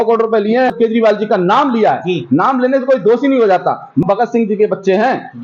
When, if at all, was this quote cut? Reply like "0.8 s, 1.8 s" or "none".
0.7 s, 4.0 s